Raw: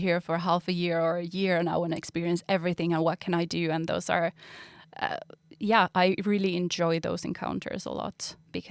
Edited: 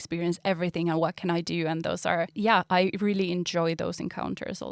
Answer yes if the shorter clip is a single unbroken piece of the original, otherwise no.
no